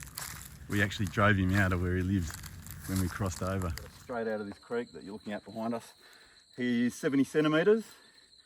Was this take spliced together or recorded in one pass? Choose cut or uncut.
cut